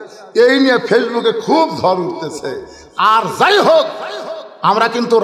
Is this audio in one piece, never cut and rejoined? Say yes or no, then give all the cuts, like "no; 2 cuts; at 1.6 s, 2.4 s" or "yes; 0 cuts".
yes; 0 cuts